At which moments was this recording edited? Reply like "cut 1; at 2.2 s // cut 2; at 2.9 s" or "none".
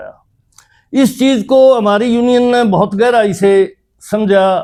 none